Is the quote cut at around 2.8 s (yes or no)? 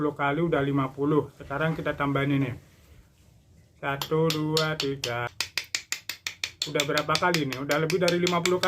no